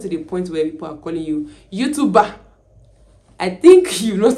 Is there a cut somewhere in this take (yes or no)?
no